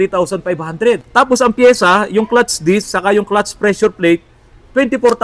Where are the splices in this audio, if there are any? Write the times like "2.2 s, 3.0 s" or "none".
1.0 s